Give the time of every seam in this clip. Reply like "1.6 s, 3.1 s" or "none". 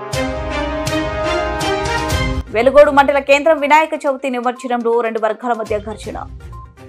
2.3 s